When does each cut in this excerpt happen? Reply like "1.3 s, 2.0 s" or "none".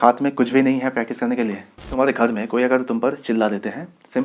1.9 s